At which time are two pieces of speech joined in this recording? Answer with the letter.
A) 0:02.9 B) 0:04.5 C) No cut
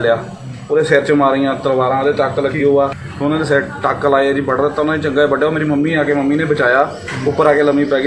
A